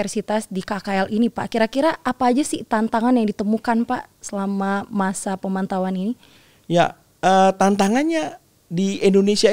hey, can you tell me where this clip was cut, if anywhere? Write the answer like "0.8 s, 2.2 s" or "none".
none